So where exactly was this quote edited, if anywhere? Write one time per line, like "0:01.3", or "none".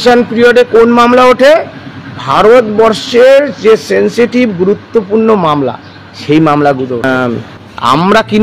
0:07.0